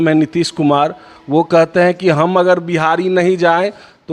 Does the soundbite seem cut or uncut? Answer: uncut